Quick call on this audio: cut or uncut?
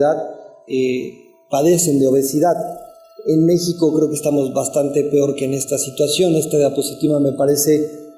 uncut